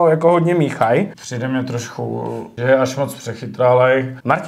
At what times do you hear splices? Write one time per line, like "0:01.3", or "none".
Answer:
0:01.2
0:02.5